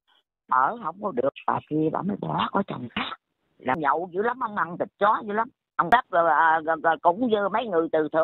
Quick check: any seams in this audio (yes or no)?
yes